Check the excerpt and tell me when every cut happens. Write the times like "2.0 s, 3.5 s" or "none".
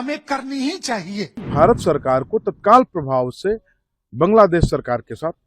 1.5 s